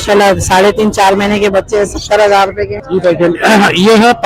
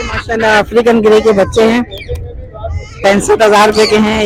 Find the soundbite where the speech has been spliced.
first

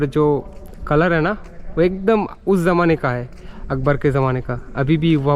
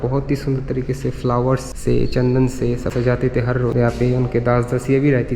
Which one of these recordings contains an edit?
second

